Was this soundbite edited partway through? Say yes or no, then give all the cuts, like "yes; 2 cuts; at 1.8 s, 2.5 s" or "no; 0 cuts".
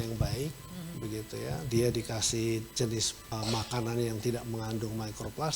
yes; 1 cut; at 3.2 s